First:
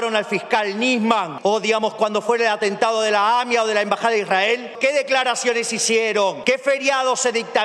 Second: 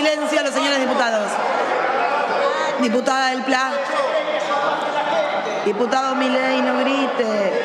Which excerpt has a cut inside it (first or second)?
first